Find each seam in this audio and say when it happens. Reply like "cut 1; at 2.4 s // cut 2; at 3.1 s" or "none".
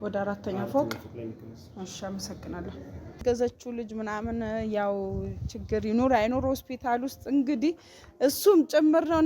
cut 1; at 3.2 s